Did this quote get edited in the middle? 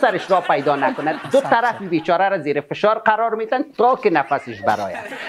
yes; 1 cut; at 1.2 s

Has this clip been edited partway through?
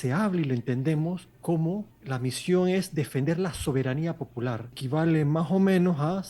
yes; 3 cuts; at 1.3 s, 2.0 s, 4.7 s

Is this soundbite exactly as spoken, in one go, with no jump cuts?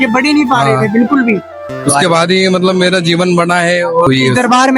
no; 2 cuts; at 1.8 s, 4.1 s

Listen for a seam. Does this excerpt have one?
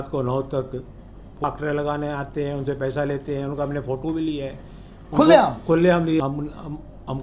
yes; 2 cuts; at 1.4 s, 6.2 s

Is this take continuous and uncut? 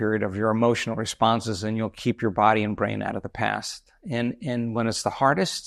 yes; 0 cuts

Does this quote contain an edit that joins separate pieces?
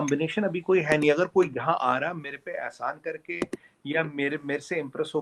no; 0 cuts

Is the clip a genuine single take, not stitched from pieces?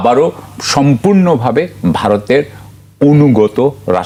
yes; 0 cuts

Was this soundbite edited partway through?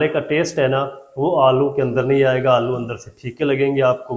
no; 0 cuts

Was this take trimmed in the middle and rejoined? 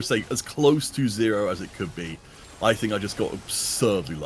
no; 0 cuts

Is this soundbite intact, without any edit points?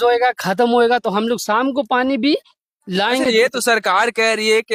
yes; 0 cuts

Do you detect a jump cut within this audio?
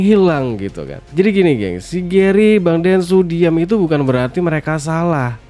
no; 0 cuts

